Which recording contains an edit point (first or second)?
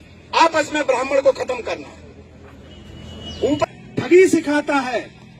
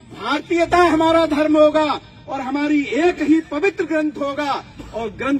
first